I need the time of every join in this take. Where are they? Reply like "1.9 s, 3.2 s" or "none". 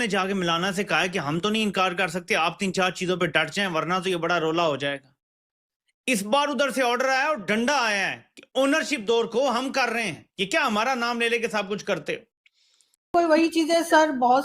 12.9 s